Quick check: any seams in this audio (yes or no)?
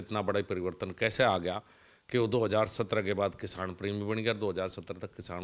no